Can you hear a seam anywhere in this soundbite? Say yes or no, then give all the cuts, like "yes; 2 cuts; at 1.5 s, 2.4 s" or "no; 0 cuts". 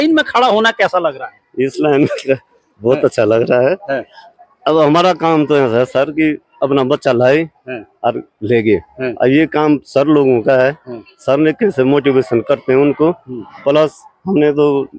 no; 0 cuts